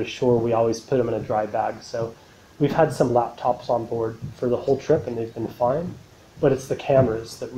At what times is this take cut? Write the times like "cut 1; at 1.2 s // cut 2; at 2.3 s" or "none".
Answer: cut 1; at 5.8 s